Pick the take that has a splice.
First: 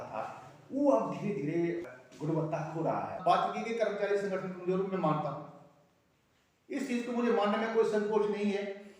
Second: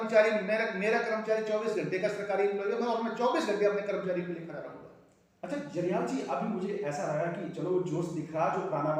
first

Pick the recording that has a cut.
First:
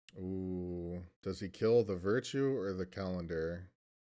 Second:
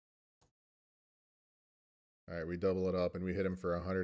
first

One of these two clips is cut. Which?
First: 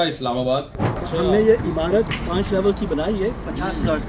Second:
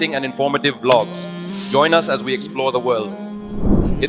first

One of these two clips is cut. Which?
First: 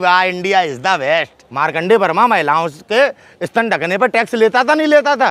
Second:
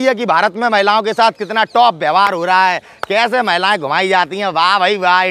first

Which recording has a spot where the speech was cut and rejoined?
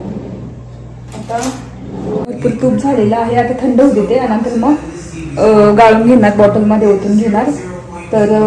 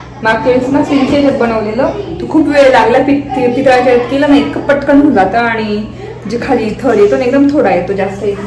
first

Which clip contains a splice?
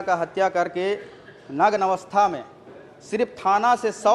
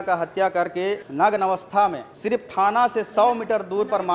second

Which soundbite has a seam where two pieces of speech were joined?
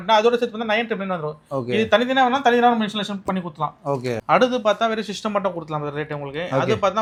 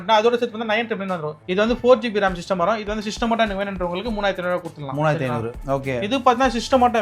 second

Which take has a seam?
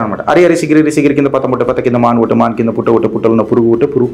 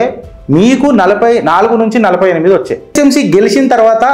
second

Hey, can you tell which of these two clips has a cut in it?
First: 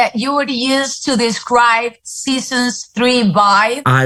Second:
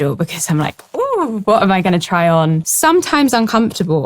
second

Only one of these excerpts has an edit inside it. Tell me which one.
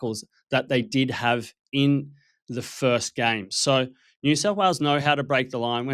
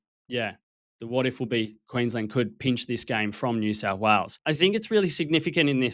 second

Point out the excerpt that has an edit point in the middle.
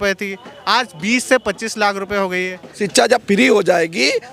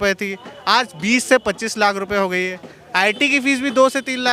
first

